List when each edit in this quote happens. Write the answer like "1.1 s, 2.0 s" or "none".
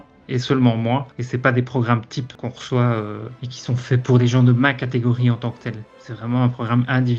2.3 s, 4.0 s